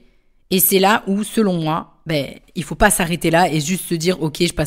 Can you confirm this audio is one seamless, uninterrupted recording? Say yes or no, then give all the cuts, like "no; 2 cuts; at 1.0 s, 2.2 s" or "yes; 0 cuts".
yes; 0 cuts